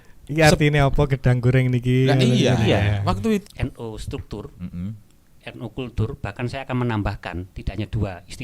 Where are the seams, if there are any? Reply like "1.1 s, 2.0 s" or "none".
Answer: 3.4 s